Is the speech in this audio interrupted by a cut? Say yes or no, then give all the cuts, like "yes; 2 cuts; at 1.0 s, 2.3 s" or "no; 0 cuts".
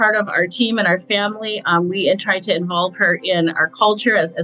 no; 0 cuts